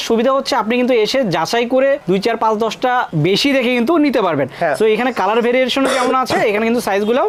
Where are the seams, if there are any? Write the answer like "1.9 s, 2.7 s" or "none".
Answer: none